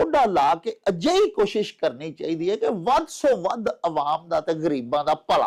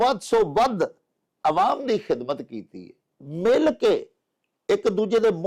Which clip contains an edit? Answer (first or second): second